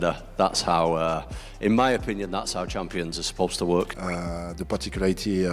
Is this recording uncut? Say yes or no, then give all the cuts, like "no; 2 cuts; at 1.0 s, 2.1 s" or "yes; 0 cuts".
no; 1 cut; at 4.0 s